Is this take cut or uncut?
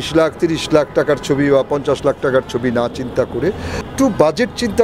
cut